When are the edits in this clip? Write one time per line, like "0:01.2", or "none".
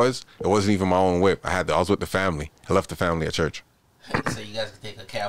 none